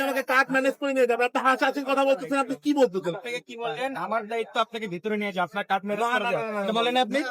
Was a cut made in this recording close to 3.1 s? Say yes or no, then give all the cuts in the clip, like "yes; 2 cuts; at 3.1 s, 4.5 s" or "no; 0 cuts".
yes; 1 cut; at 3.1 s